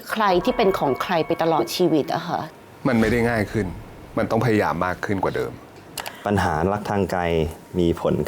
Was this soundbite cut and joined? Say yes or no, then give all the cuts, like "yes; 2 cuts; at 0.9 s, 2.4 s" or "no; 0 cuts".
yes; 2 cuts; at 2.5 s, 5.8 s